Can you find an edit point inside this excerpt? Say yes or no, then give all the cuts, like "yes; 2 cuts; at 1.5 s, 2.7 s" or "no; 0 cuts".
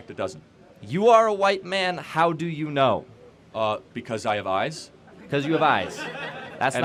no; 0 cuts